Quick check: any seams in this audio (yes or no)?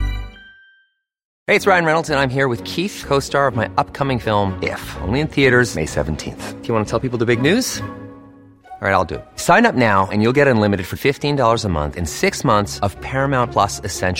yes